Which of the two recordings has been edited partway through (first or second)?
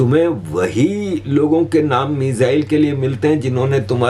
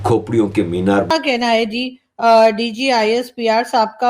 second